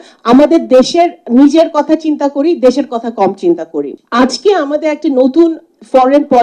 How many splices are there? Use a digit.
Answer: 1